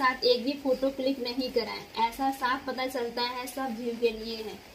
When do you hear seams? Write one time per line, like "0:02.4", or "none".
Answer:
none